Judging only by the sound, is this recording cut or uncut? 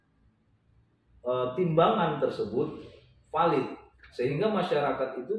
uncut